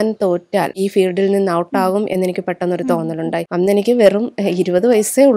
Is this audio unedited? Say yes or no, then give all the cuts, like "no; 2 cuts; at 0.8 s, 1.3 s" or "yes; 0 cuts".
no; 2 cuts; at 0.8 s, 3.5 s